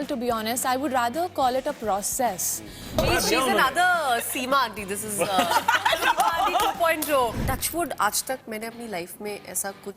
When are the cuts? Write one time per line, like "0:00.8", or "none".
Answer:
0:02.9
0:07.4